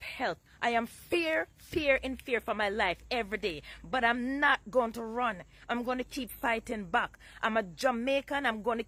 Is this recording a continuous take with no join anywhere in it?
yes; 0 cuts

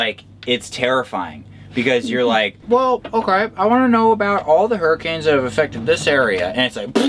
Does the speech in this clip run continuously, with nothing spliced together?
no; 1 cut; at 2.6 s

